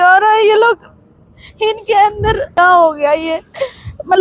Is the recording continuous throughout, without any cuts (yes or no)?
no